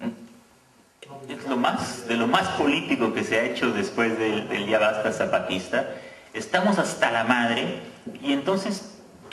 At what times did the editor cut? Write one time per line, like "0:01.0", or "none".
0:06.7